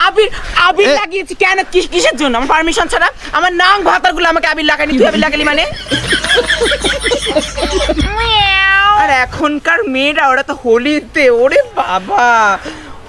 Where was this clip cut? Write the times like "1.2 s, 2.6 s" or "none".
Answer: 9.1 s